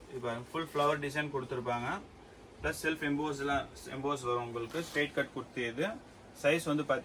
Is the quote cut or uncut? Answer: uncut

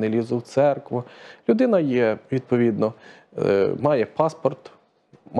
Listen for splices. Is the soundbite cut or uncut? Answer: uncut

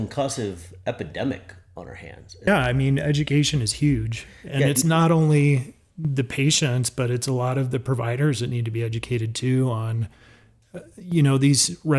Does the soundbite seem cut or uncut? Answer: cut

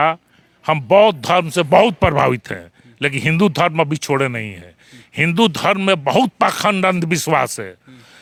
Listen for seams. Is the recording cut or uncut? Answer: uncut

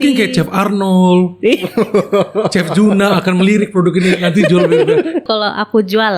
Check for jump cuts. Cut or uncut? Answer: cut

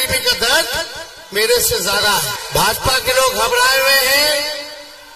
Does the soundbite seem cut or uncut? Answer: cut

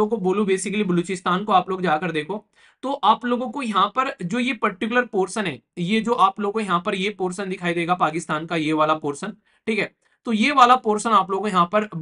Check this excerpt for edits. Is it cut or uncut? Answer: uncut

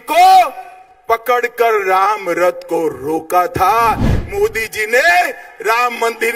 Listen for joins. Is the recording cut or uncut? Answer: cut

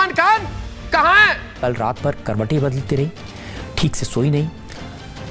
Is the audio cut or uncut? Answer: cut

